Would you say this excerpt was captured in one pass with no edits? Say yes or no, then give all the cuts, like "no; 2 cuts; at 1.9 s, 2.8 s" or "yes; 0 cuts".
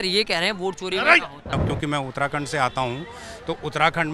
no; 1 cut; at 1.6 s